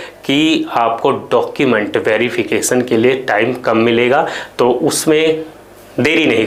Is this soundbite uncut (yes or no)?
yes